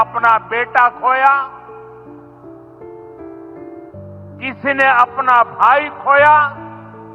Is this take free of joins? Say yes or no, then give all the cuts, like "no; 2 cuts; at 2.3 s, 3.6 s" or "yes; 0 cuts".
yes; 0 cuts